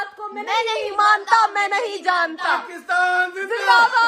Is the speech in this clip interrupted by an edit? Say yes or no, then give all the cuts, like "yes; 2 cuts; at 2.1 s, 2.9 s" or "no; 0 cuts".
no; 0 cuts